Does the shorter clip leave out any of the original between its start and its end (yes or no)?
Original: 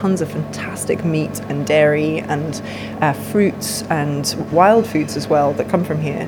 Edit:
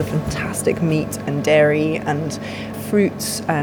yes